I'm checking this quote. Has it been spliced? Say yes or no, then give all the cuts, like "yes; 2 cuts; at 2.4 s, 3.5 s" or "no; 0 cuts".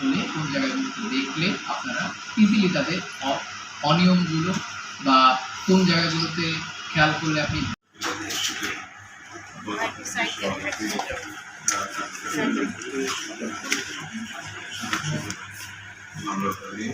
yes; 1 cut; at 7.9 s